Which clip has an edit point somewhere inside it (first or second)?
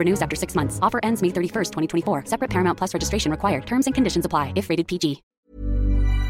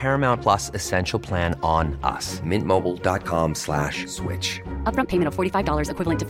first